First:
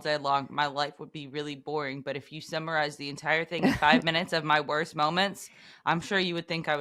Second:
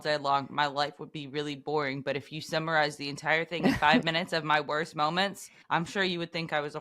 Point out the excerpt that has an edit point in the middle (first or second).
second